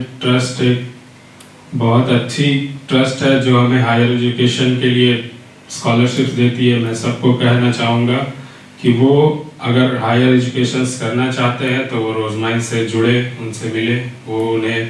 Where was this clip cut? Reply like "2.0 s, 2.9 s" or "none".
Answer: none